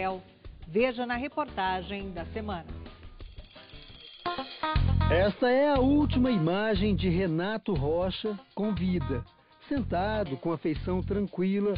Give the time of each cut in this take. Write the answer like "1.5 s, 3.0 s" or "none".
4.4 s

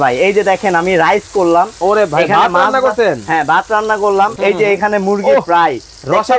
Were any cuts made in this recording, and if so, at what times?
4.3 s

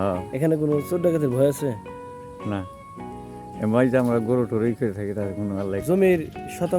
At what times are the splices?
5.8 s

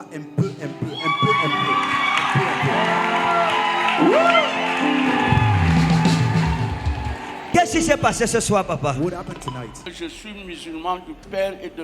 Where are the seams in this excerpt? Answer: 7.5 s, 9.8 s

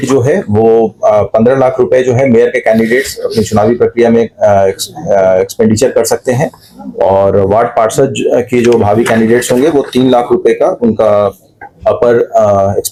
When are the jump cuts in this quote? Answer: none

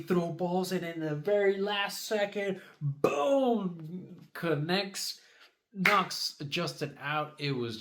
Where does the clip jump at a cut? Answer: none

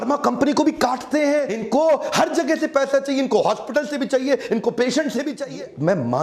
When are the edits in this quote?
1.6 s, 5.4 s

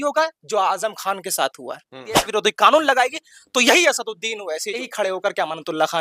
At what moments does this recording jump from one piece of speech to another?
2.2 s, 4.9 s

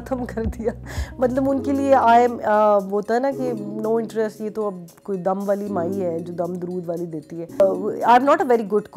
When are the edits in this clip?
7.6 s

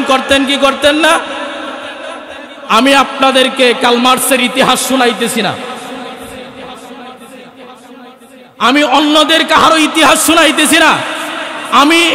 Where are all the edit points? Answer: none

